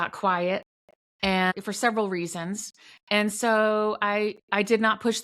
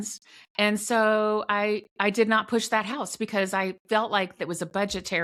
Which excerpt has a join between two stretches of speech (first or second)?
first